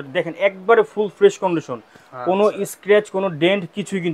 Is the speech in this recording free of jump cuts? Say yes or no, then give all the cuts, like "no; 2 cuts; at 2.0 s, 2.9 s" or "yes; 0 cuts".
yes; 0 cuts